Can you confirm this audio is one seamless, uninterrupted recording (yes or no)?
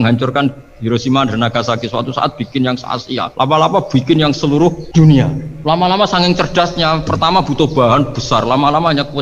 no